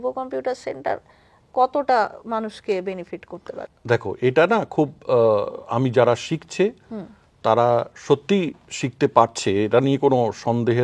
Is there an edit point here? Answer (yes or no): no